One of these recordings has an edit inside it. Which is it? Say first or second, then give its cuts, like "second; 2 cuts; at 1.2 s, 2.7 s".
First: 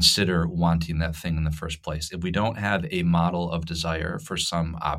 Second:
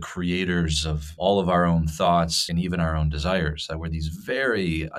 second; 2 cuts; at 1.1 s, 2.4 s